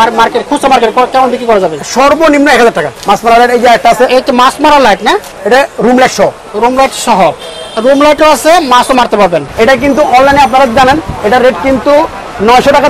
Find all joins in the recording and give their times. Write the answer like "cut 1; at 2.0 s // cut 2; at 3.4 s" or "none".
cut 1; at 2.9 s // cut 2; at 5.3 s // cut 3; at 9.5 s